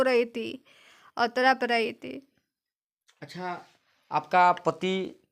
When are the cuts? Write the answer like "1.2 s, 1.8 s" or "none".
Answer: none